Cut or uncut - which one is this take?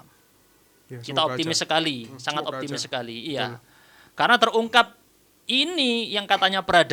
uncut